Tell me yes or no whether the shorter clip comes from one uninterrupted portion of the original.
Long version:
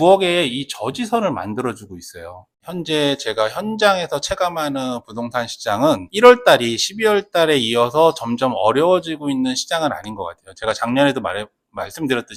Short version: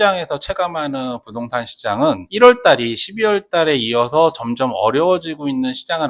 yes